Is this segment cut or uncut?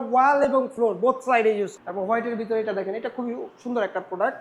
cut